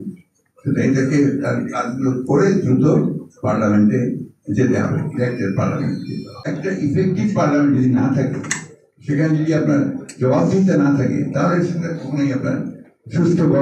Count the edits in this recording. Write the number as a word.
one